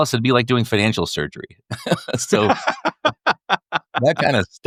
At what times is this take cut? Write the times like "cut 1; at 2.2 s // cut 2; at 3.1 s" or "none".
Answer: none